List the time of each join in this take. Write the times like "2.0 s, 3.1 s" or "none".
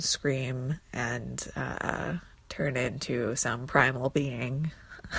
2.4 s